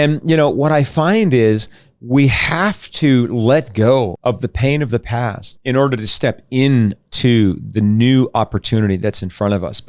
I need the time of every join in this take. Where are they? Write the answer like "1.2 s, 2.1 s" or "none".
4.1 s, 5.5 s

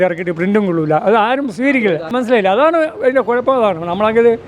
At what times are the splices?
none

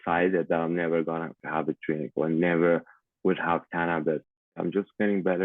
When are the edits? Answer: 1.4 s, 4.5 s

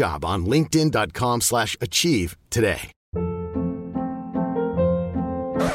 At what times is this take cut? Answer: 2.9 s

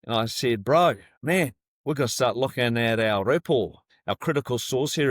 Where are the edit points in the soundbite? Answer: 1.1 s, 3.9 s

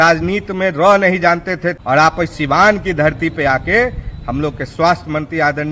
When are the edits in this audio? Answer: 1.8 s

